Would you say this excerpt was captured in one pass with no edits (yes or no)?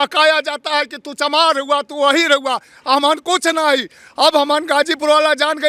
yes